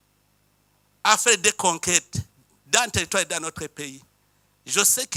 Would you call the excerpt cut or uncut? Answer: uncut